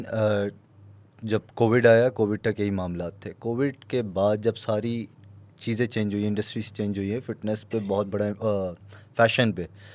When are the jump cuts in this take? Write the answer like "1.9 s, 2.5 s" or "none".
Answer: none